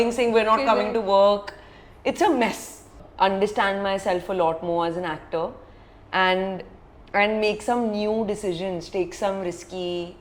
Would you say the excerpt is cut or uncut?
cut